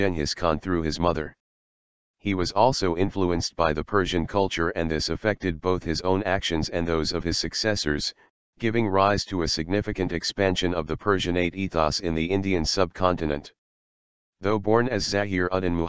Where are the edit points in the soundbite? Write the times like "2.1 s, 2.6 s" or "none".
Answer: 4.5 s